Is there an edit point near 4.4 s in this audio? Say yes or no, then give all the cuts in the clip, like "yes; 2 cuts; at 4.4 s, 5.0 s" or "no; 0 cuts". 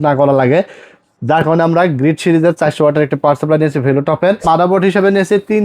yes; 1 cut; at 4.4 s